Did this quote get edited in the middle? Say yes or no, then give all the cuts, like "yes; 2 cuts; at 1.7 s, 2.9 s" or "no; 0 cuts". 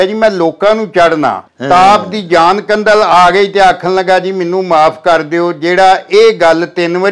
yes; 1 cut; at 1.5 s